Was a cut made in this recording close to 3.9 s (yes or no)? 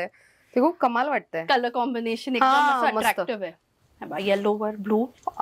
no